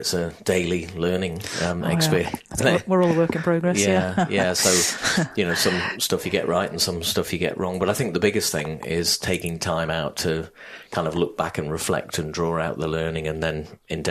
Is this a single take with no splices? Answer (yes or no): yes